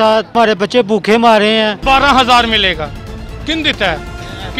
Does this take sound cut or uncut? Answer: cut